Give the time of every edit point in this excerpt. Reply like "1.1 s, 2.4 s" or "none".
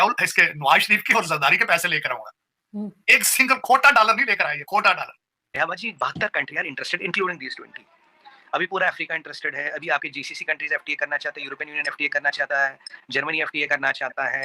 5.6 s